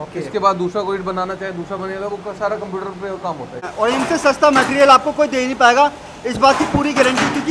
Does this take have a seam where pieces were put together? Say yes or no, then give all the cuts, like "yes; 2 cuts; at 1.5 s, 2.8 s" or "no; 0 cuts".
yes; 1 cut; at 3.7 s